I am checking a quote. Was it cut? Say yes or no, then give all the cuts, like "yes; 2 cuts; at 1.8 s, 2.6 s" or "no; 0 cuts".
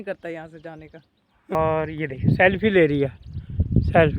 yes; 1 cut; at 1.6 s